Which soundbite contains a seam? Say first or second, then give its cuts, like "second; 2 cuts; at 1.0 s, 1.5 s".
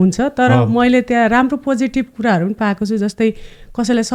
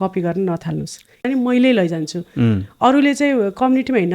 second; 1 cut; at 1.2 s